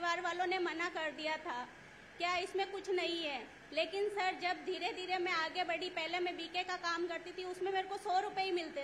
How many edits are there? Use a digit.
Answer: 0